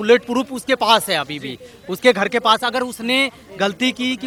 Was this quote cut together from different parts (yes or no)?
no